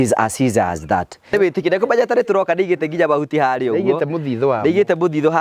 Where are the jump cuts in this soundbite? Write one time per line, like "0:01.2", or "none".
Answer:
0:01.3